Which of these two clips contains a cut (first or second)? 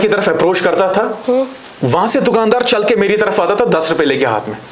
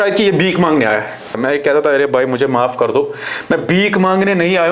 second